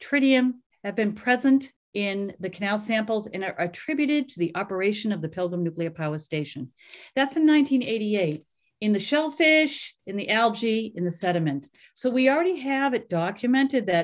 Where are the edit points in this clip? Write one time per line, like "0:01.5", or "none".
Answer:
0:01.8